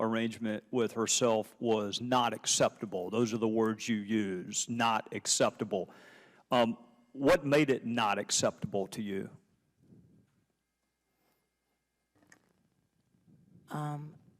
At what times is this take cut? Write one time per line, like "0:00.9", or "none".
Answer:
0:04.8